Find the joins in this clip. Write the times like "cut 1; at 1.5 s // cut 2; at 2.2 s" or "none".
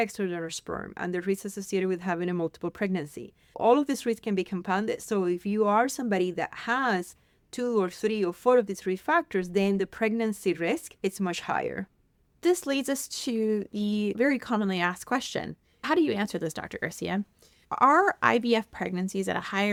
none